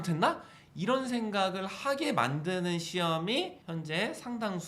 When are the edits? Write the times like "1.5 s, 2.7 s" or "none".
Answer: 3.6 s